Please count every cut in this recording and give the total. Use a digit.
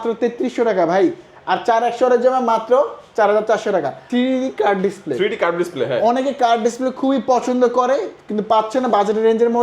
1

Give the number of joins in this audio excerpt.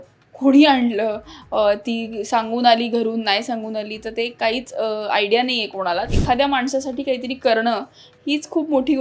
1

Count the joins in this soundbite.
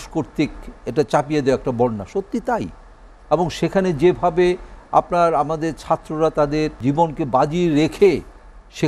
1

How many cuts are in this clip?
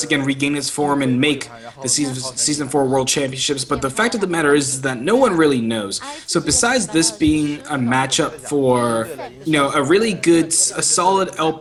0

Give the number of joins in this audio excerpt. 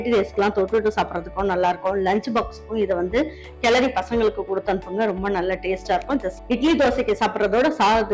1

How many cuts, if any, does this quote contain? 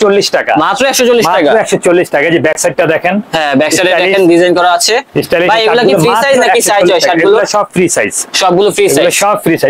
0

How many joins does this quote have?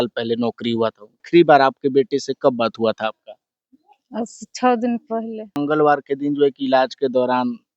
2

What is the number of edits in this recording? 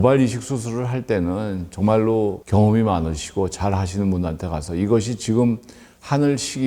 1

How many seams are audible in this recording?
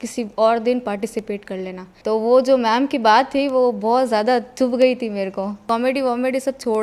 1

